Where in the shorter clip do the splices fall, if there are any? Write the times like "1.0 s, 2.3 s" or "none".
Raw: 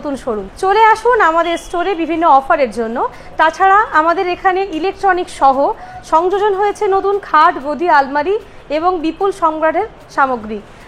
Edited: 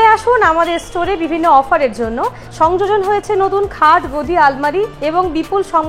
2.4 s, 4.9 s